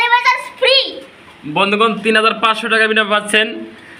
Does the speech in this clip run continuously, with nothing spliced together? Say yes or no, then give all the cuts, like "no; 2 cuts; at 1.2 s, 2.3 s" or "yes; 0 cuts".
yes; 0 cuts